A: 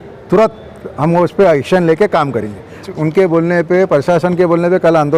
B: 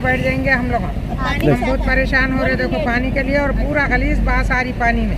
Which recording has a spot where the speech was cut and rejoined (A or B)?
A